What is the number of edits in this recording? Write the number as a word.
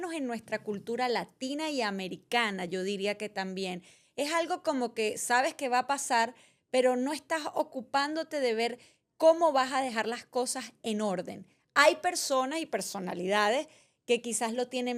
zero